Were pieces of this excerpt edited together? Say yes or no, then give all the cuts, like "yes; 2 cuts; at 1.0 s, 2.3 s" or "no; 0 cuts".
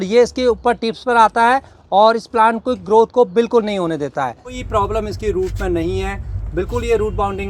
yes; 1 cut; at 4.6 s